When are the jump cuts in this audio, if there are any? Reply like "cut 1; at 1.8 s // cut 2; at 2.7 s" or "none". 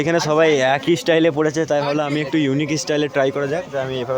none